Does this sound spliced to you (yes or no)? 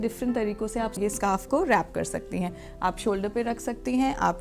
yes